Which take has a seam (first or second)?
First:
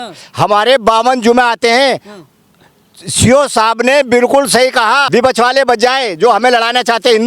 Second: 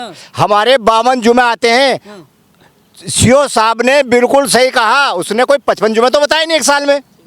first